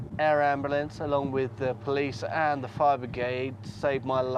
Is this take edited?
no; 0 cuts

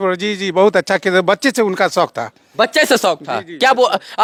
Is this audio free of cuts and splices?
yes; 0 cuts

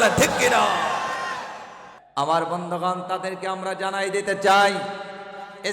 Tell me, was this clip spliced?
yes; 1 cut; at 1.9 s

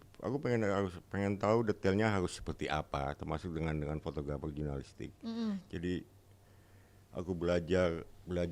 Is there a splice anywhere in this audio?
no; 0 cuts

